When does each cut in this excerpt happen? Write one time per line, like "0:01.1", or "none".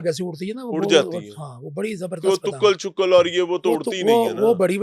none